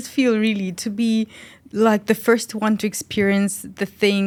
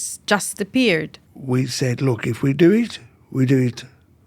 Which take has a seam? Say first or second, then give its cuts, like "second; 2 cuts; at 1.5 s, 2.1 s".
second; 1 cut; at 1.2 s